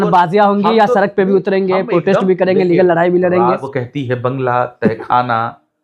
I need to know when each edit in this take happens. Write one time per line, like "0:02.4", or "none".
0:03.7